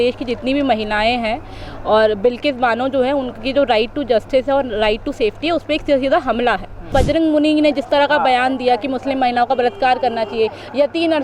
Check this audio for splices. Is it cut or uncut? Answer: cut